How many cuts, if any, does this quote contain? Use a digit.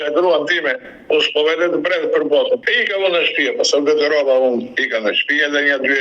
1